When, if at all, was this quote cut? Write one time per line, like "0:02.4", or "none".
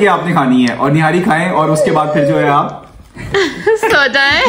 none